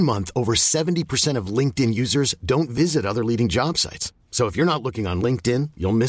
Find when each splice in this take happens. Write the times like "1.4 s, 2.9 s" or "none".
none